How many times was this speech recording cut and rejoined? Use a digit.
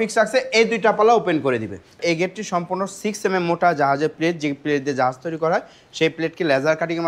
1